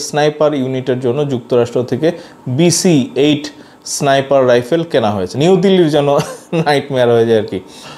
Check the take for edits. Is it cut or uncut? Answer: cut